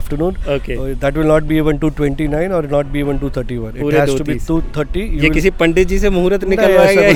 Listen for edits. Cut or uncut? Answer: uncut